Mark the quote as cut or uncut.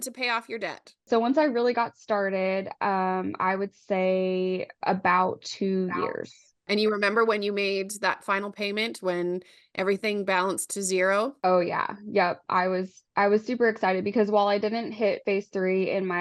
uncut